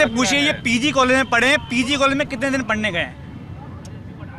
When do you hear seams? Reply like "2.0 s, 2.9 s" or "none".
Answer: none